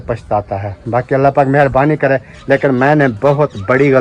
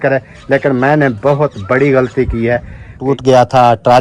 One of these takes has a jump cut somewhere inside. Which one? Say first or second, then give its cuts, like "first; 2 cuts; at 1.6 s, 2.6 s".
second; 1 cut; at 3.0 s